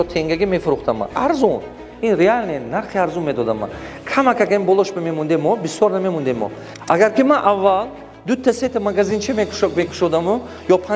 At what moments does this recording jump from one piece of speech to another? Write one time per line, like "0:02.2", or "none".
0:06.7